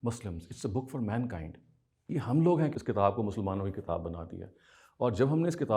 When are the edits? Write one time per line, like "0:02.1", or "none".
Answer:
0:02.8